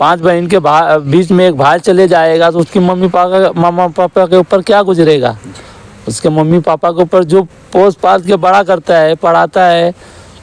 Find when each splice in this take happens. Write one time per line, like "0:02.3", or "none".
none